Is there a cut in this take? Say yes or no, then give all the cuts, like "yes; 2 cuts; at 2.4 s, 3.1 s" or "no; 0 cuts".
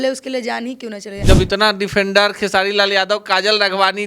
yes; 1 cut; at 1.1 s